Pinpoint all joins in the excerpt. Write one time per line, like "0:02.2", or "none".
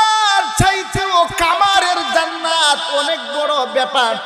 none